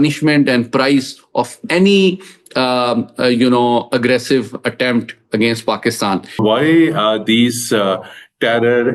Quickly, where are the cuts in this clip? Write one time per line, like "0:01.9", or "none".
0:06.4